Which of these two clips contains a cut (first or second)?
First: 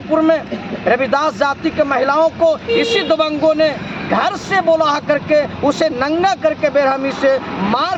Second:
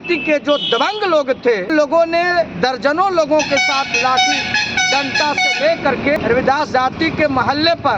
second